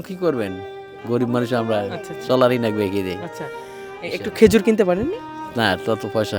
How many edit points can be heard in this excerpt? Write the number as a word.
zero